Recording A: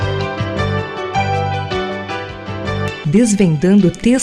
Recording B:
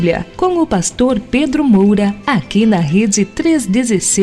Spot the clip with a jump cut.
B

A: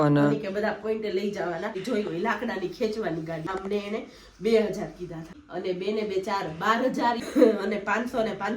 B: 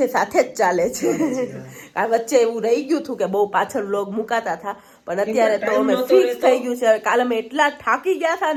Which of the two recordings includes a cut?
A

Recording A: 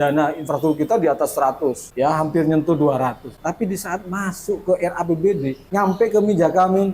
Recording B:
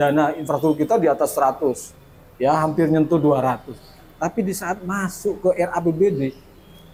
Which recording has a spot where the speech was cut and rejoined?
A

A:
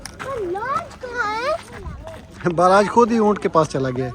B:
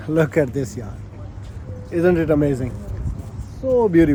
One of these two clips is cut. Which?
A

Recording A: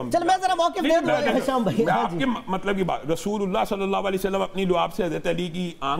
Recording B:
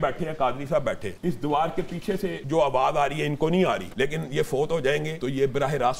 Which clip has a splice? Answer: B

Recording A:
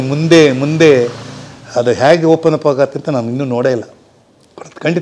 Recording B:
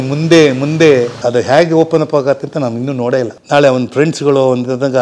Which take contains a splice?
B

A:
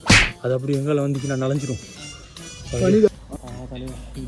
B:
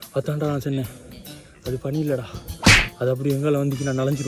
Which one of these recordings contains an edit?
A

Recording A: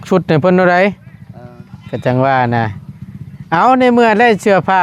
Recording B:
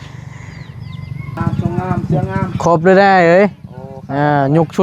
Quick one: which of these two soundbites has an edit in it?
B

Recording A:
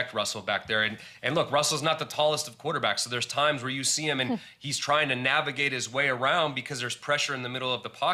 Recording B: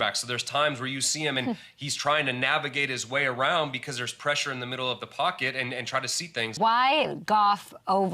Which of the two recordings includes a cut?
B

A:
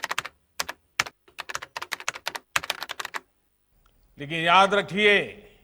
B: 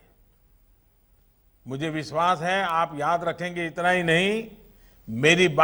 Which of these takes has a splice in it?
A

